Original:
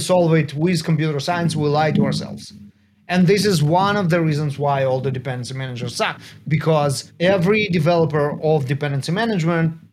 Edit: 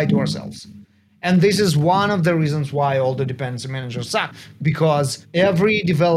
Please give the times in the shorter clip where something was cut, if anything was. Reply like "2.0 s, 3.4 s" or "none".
none